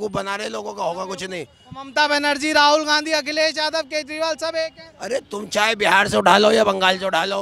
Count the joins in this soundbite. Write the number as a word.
zero